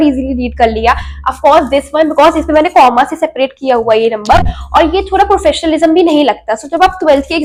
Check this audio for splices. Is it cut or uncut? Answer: uncut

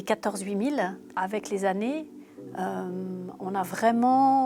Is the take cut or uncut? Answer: uncut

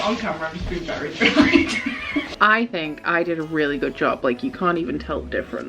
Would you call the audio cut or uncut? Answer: cut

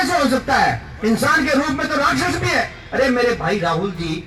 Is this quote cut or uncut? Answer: uncut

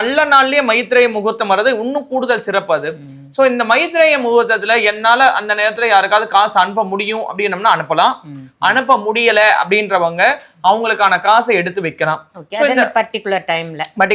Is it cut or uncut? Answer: uncut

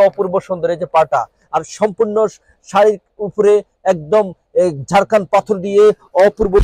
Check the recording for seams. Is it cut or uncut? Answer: uncut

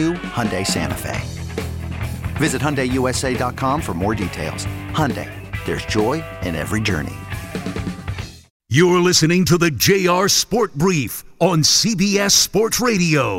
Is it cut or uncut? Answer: cut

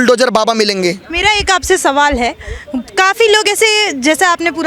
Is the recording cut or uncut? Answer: uncut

